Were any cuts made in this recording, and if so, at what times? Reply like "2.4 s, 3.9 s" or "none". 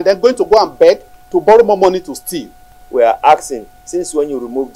2.6 s